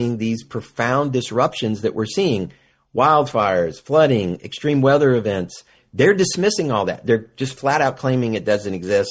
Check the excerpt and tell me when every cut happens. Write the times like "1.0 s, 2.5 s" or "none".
5.8 s